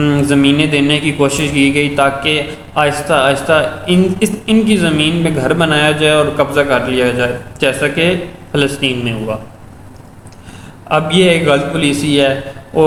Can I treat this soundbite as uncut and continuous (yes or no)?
yes